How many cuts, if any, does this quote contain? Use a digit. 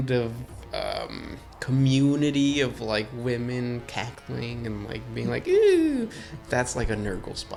0